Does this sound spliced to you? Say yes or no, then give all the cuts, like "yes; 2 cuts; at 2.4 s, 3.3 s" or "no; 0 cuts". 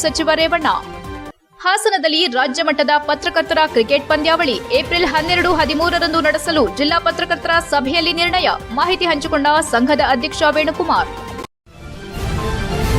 yes; 1 cut; at 11.3 s